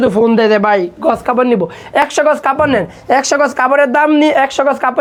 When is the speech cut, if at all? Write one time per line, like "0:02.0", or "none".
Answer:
none